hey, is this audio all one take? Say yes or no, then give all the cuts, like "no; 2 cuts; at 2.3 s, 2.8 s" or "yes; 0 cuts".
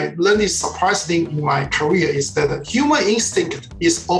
yes; 0 cuts